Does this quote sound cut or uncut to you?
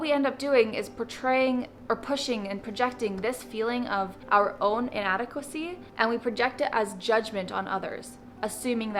uncut